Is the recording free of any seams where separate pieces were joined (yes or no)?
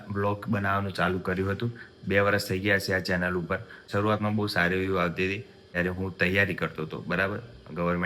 no